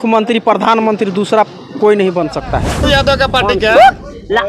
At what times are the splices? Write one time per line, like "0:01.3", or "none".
0:02.9